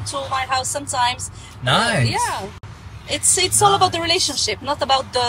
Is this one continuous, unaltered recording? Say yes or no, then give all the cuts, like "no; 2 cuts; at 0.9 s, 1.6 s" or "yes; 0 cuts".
yes; 0 cuts